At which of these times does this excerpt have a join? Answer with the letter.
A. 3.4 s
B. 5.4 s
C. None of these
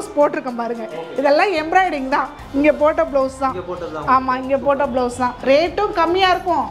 B